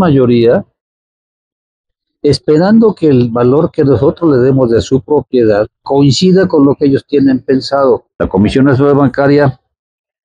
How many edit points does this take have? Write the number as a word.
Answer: one